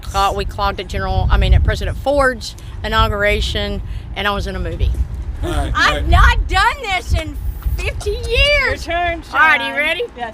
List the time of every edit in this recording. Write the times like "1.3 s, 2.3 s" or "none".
5.2 s

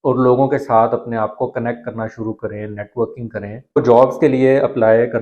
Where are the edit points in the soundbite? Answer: 3.8 s

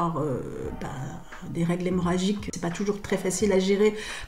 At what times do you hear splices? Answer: 2.5 s

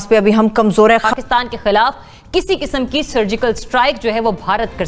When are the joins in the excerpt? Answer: 1.1 s

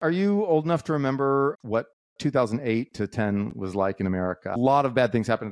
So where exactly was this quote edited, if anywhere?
1.6 s, 4.6 s

